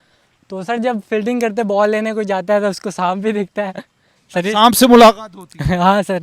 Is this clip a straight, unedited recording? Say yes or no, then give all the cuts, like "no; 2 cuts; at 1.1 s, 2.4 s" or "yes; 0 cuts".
yes; 0 cuts